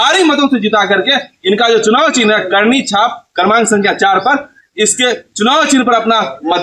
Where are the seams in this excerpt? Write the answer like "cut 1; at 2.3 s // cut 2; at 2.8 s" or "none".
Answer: none